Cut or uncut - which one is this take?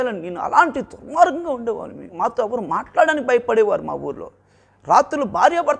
cut